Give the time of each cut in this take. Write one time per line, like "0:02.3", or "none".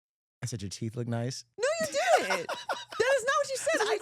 0:01.4